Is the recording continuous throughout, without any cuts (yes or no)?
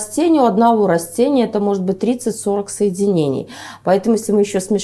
yes